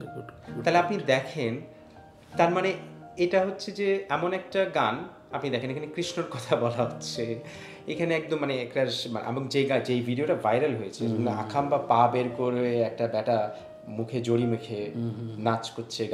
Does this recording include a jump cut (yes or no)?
no